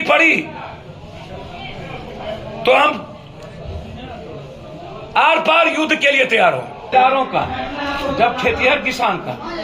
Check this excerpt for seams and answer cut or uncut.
cut